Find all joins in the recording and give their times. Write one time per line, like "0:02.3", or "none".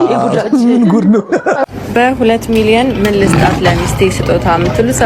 0:01.6